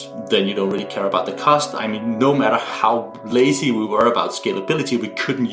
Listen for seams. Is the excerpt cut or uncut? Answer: uncut